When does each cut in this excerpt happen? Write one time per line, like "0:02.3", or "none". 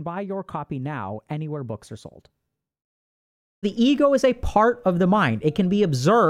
0:03.6